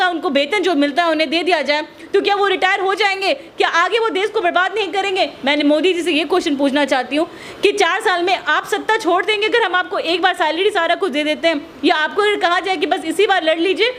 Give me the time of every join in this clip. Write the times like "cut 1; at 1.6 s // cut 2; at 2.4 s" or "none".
none